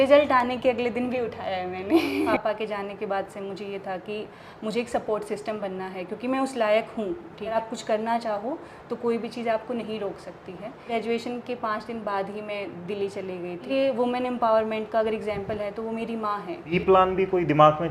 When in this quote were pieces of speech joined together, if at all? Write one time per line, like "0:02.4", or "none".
0:02.3
0:07.5
0:10.9
0:13.7
0:16.8